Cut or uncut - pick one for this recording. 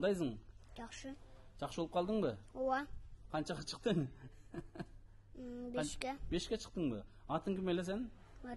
uncut